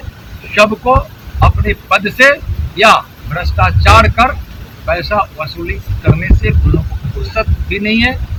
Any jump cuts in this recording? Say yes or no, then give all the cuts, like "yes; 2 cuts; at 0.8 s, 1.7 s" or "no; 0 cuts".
no; 0 cuts